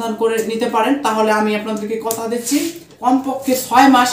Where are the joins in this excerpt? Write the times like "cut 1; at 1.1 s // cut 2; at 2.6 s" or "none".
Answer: cut 1; at 2.9 s